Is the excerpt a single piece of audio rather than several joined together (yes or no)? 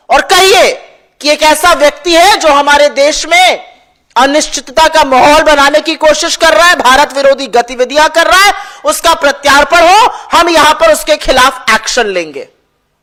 yes